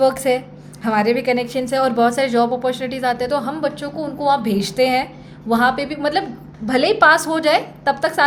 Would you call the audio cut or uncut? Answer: uncut